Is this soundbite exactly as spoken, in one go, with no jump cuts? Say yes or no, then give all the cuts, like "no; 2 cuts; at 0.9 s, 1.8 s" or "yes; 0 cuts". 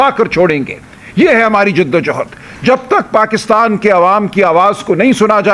yes; 0 cuts